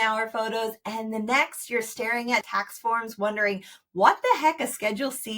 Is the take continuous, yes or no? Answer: no